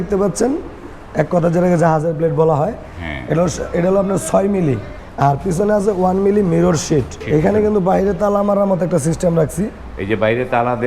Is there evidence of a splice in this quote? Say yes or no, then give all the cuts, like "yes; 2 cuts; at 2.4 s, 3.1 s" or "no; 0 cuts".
yes; 2 cuts; at 5.0 s, 7.2 s